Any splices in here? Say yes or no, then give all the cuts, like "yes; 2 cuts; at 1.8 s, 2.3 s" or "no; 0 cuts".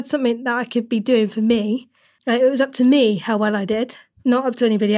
yes; 1 cut; at 4.1 s